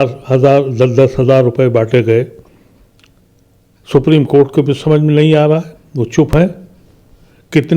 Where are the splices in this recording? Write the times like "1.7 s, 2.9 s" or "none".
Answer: none